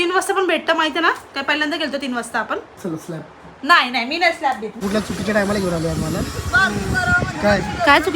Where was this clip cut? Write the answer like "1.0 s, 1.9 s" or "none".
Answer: 4.8 s